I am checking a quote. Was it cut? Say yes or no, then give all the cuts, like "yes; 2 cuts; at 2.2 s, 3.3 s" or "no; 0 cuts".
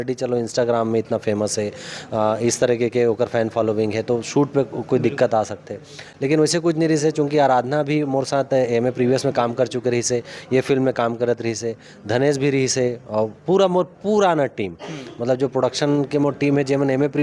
no; 0 cuts